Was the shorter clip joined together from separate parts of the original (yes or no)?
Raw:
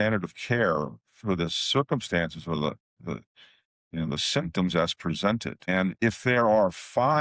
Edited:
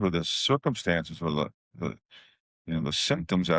no